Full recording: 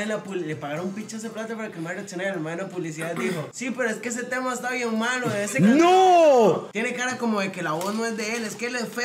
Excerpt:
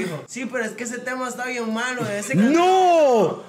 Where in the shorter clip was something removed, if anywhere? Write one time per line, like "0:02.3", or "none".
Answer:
none

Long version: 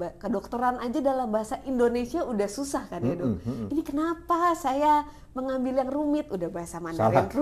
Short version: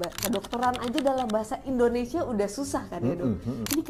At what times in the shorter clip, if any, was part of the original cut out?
none

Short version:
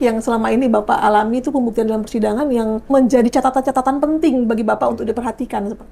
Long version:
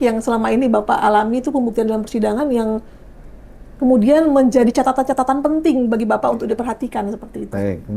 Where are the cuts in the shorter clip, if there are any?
0:02.9

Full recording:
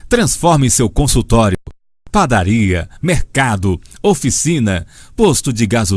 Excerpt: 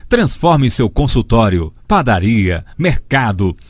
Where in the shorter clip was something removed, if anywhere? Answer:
0:01.7

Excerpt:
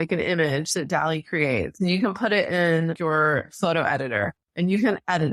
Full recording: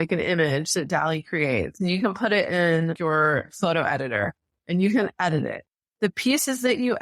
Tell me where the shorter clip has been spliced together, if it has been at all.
0:04.4

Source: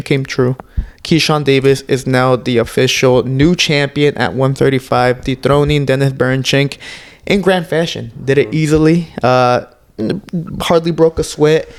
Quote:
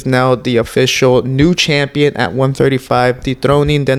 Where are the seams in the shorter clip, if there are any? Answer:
none

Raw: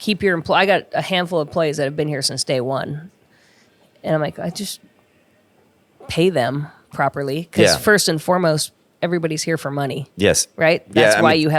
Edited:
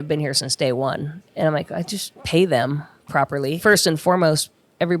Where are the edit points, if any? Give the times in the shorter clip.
0:01.2
0:02.1
0:03.6

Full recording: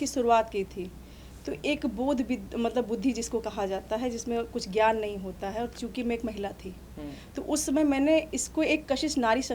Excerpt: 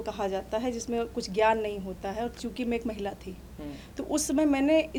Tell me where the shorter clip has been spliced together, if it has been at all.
none

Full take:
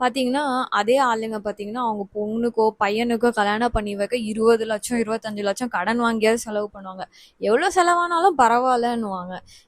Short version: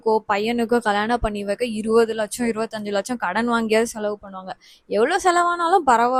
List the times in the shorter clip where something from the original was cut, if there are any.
none

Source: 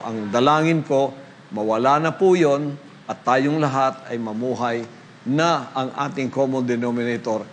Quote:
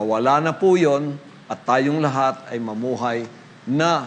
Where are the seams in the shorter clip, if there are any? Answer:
none

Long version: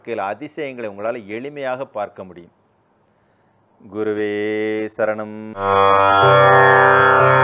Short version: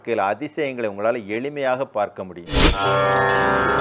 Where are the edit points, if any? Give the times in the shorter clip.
0:02.8

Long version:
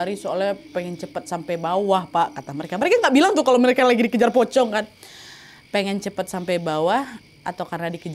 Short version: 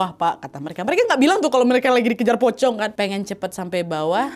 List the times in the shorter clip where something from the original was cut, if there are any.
0:02.9

